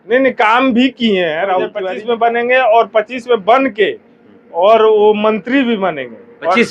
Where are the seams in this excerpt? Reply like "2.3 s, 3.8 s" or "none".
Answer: 1.8 s